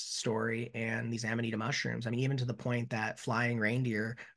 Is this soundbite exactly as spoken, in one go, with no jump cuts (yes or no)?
yes